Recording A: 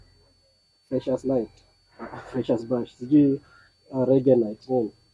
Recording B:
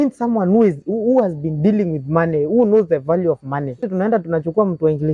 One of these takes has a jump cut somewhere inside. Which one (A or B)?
B